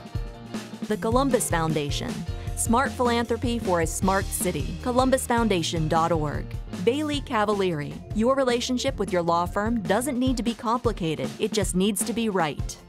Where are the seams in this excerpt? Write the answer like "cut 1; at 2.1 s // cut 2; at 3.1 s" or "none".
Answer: cut 1; at 0.9 s